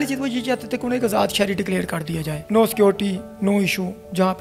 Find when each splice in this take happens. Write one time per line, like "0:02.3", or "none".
none